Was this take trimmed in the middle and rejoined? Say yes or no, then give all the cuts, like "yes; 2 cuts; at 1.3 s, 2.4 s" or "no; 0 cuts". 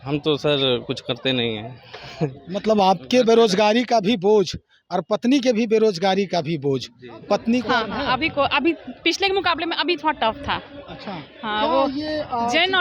yes; 1 cut; at 7.7 s